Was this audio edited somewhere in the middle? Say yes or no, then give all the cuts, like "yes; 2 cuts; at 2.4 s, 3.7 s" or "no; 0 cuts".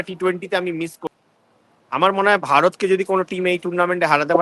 yes; 1 cut; at 1.0 s